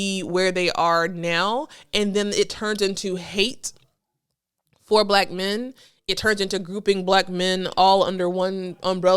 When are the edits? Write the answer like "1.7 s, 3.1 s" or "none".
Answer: none